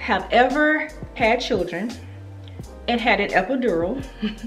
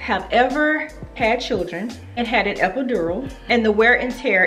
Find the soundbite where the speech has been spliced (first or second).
second